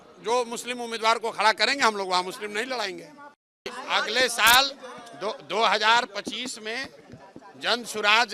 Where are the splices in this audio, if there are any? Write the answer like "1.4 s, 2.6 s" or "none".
3.7 s